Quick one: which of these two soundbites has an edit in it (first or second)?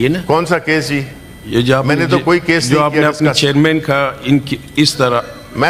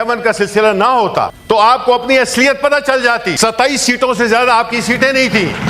second